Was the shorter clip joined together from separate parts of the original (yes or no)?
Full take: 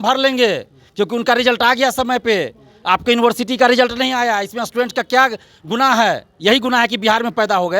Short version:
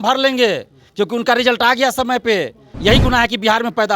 yes